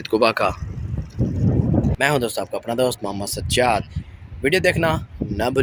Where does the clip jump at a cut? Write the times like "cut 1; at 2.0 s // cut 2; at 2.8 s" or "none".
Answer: cut 1; at 1.9 s